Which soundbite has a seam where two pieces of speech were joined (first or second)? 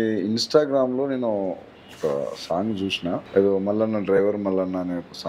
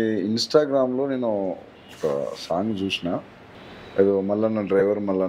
first